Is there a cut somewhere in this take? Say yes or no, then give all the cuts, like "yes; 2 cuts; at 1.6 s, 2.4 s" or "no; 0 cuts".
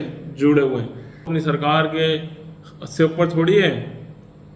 yes; 1 cut; at 1.3 s